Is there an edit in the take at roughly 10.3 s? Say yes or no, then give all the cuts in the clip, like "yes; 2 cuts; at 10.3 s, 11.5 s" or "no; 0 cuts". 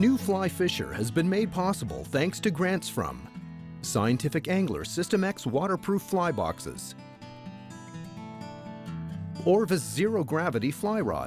no; 0 cuts